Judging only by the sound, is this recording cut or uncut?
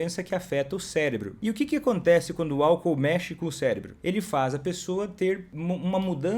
cut